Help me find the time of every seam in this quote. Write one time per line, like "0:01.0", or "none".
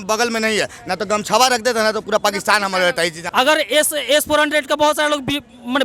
0:03.2